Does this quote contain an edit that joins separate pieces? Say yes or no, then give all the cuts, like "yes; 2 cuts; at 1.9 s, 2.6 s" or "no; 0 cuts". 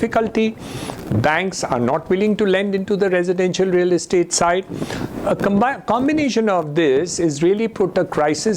no; 0 cuts